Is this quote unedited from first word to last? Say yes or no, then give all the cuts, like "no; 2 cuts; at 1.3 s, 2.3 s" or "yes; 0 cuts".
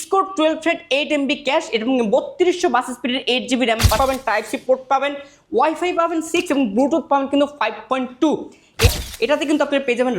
no; 2 cuts; at 4.0 s, 8.9 s